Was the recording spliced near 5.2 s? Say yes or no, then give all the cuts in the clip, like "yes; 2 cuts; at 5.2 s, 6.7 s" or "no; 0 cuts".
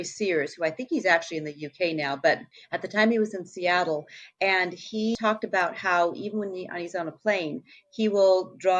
yes; 1 cut; at 5.2 s